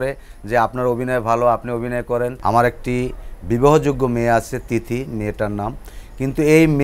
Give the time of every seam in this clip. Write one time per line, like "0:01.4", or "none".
0:02.4